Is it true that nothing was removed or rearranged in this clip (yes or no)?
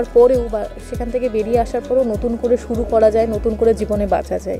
yes